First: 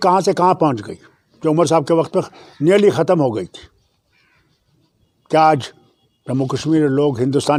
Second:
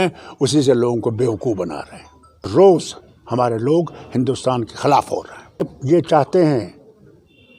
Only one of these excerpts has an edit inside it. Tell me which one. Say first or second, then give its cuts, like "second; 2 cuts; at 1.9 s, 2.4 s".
second; 2 cuts; at 2.5 s, 5.8 s